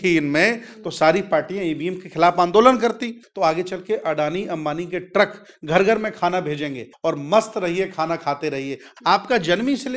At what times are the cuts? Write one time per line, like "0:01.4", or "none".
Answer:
0:03.2
0:06.9
0:08.9